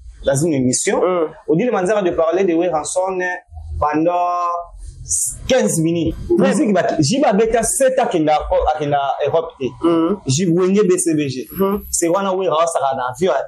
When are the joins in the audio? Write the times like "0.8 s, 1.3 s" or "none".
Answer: 6.2 s